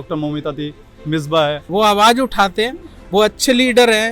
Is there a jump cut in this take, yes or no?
yes